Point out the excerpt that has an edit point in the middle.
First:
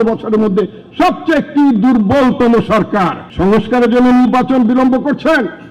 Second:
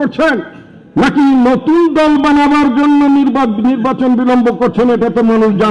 first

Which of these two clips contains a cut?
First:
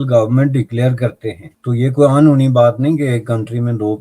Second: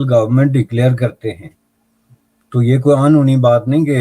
first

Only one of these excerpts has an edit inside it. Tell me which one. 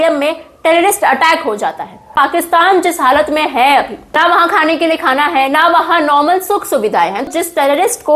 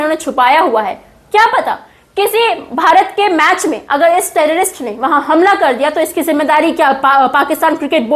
first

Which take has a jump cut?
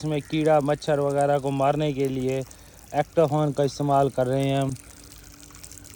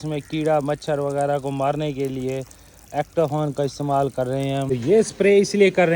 second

